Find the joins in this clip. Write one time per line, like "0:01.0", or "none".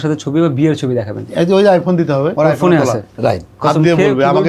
0:02.3
0:03.5